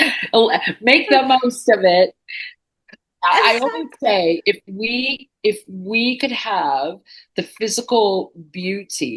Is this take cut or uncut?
uncut